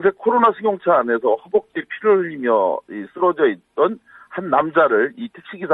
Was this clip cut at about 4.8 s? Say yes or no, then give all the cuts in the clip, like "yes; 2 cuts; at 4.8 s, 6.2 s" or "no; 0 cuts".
no; 1 cut; at 3.3 s